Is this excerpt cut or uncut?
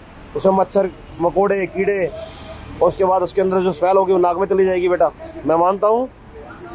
uncut